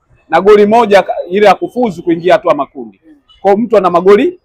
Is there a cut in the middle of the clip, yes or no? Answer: no